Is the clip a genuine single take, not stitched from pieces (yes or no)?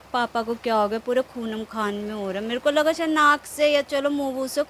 yes